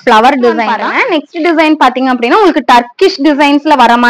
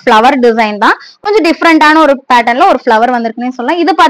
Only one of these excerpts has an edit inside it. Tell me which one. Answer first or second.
first